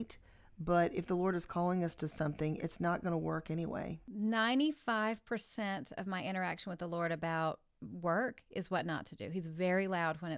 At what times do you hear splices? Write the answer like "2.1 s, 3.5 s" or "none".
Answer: 4.0 s